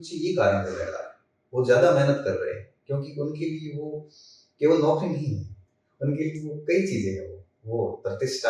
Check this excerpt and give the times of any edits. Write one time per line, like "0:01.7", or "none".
none